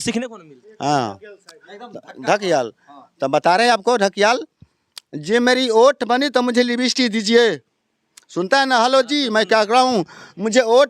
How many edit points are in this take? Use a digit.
0